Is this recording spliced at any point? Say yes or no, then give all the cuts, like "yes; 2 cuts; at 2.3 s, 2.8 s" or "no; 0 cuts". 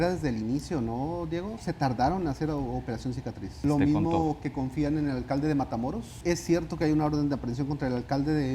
yes; 2 cuts; at 3.6 s, 6.2 s